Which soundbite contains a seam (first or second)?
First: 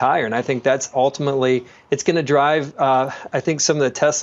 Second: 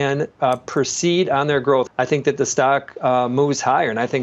second